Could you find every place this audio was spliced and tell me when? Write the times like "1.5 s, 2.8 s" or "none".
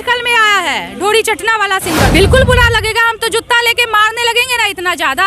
2.1 s